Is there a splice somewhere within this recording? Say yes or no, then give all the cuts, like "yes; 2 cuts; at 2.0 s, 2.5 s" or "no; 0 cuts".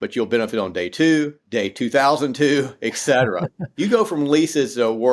yes; 2 cuts; at 1.4 s, 3.6 s